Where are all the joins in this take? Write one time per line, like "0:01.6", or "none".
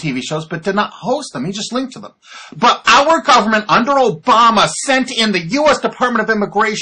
none